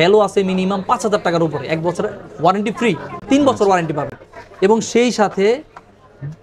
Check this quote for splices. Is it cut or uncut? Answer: uncut